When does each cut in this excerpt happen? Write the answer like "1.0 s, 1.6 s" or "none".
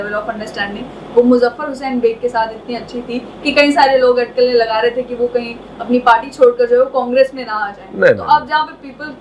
none

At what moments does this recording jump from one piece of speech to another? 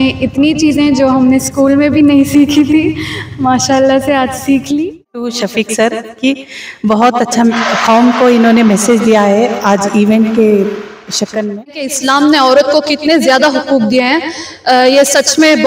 5.3 s, 11.9 s

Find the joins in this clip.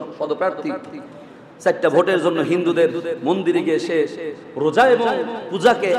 none

